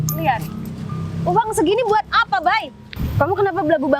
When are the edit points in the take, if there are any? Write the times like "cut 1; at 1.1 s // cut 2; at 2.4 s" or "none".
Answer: cut 1; at 3.0 s